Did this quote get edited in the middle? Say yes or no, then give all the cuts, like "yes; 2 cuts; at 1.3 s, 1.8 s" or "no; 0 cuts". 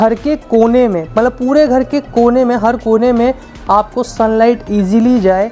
no; 0 cuts